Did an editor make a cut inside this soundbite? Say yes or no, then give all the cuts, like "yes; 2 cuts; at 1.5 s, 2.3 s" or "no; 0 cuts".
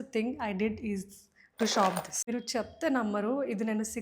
yes; 1 cut; at 2.2 s